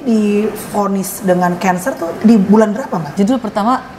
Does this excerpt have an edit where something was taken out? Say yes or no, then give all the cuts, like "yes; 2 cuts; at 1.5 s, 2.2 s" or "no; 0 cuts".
yes; 1 cut; at 3.0 s